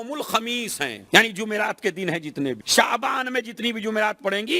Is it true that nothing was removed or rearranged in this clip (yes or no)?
no